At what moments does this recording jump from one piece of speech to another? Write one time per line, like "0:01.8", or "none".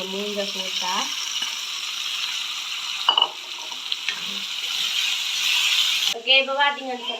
0:06.1